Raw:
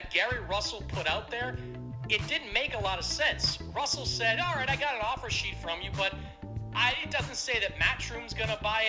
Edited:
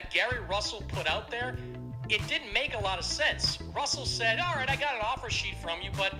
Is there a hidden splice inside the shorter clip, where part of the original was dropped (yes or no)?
no